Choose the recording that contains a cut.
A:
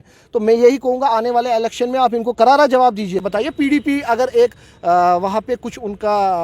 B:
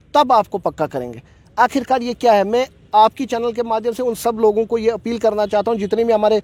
A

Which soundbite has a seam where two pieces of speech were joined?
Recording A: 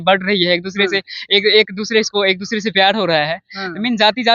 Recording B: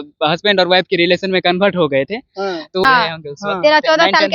B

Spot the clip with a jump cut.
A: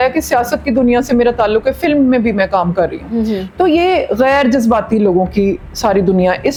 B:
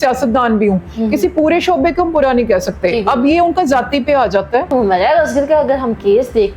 B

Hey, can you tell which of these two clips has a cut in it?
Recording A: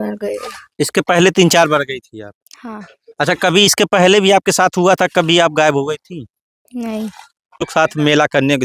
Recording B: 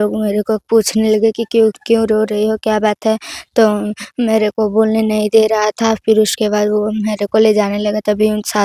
A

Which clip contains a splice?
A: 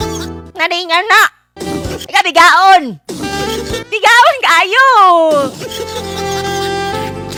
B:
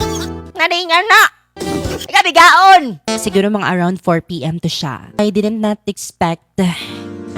B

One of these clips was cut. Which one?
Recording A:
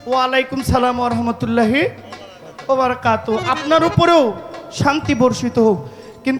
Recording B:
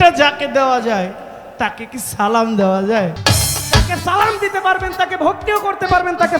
B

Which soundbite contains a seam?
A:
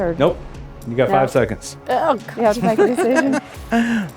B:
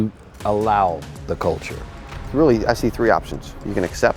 B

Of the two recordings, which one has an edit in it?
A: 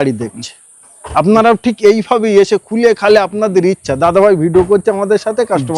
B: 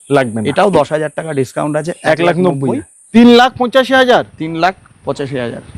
B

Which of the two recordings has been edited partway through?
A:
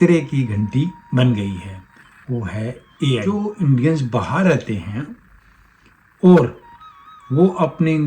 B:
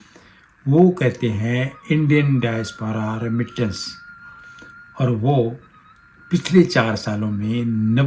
A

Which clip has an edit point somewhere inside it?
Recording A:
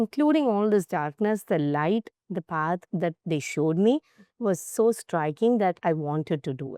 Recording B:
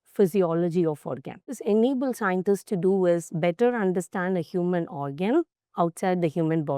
B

